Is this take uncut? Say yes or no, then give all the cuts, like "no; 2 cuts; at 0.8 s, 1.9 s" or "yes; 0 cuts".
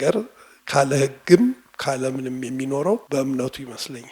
no; 1 cut; at 3.0 s